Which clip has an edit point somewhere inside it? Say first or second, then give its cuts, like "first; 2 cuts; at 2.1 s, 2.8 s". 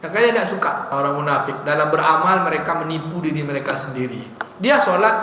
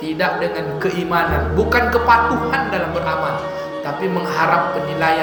first; 1 cut; at 0.9 s